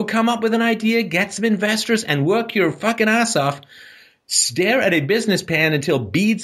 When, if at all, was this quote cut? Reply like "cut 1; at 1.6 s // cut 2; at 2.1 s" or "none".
none

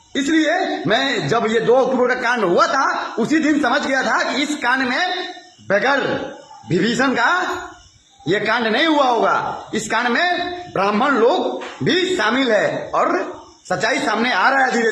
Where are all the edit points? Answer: none

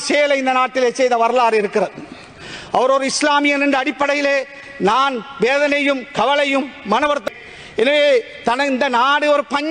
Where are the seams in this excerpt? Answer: none

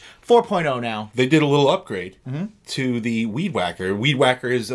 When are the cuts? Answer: cut 1; at 1.0 s

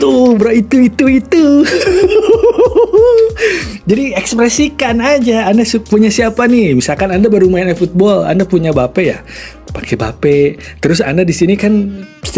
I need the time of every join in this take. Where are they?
none

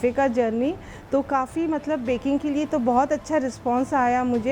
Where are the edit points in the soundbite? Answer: none

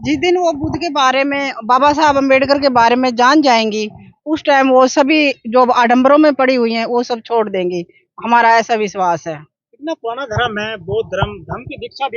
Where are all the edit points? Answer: none

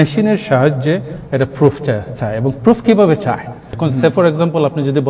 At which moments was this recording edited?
cut 1; at 3.7 s

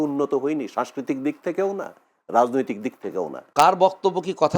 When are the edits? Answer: cut 1; at 3.4 s

